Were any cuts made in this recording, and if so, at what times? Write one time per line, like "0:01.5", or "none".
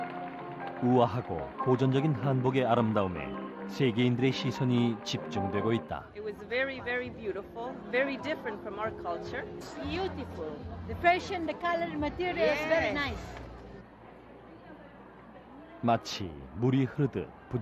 0:12.8

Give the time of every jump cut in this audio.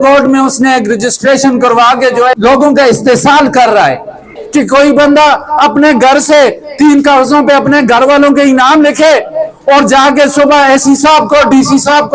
0:02.4
0:04.4

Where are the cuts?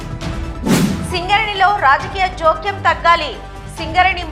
0:01.0

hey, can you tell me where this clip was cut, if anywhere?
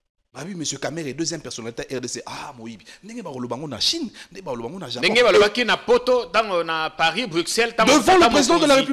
none

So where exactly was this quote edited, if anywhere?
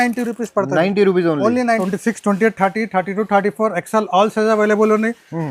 0:01.8

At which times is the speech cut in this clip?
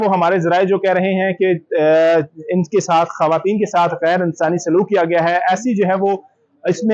none

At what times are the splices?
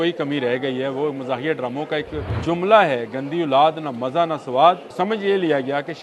0:02.2
0:04.9

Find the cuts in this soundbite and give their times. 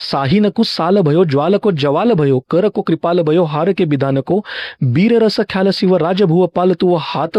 none

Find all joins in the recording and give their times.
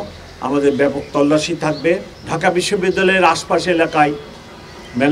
0:02.2

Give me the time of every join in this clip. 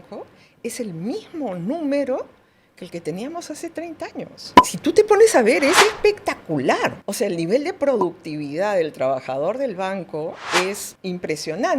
0:07.0
0:10.9

